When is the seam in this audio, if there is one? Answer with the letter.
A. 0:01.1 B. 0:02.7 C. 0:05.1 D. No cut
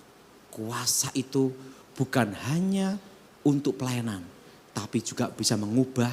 D